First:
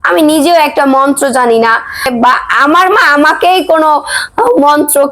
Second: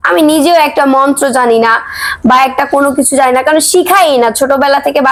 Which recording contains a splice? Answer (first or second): first